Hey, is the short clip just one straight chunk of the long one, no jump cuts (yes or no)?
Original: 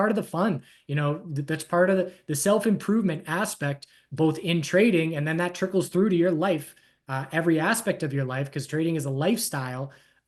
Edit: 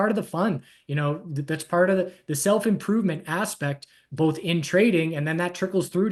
yes